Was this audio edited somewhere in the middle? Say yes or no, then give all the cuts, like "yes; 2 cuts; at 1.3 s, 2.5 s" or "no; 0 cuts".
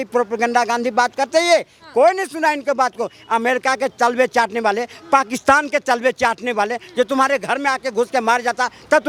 no; 0 cuts